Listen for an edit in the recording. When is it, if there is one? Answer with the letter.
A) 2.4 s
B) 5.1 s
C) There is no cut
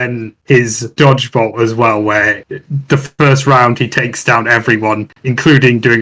C